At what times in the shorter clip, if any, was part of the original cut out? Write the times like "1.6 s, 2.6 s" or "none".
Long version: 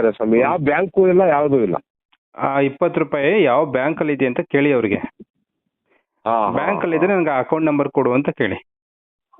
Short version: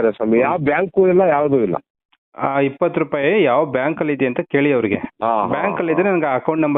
5.1 s